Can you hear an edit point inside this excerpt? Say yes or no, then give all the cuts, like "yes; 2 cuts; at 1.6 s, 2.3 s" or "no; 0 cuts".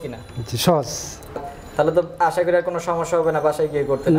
yes; 1 cut; at 1.4 s